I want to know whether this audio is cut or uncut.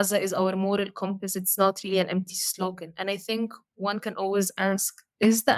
uncut